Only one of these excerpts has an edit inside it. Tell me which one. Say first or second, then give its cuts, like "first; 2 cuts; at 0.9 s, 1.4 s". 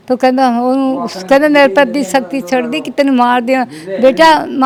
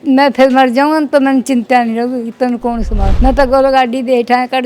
second; 1 cut; at 3.0 s